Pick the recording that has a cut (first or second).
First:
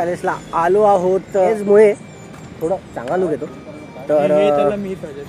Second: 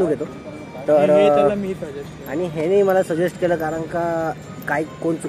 first